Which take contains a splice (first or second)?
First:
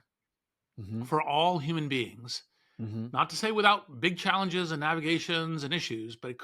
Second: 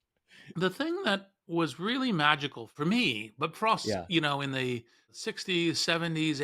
second